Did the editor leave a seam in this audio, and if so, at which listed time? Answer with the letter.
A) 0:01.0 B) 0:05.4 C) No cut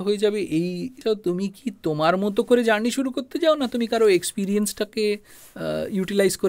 A